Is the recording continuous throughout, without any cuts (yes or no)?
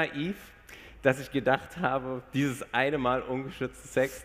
yes